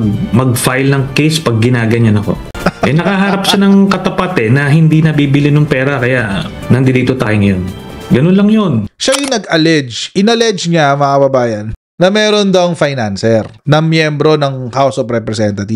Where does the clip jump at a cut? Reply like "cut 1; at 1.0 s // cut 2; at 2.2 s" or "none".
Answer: cut 1; at 8.8 s